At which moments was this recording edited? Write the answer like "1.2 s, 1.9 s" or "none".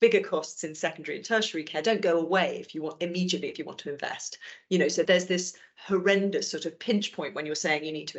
5.0 s